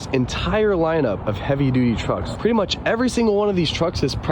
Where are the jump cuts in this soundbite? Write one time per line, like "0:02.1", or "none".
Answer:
0:01.2
0:02.3